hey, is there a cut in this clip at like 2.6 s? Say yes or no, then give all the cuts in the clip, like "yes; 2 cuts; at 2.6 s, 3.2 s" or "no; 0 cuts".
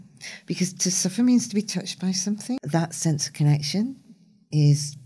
yes; 1 cut; at 2.6 s